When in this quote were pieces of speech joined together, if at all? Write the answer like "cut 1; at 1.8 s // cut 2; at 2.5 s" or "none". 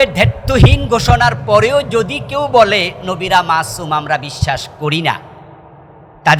none